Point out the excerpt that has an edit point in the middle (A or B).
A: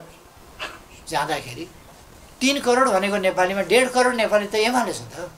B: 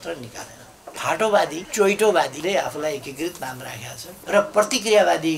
B